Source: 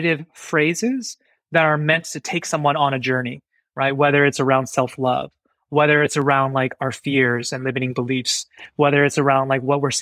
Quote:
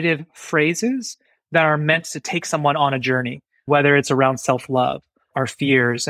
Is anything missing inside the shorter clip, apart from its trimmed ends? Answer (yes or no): yes